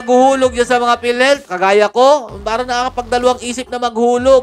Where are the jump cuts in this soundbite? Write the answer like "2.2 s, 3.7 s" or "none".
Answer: none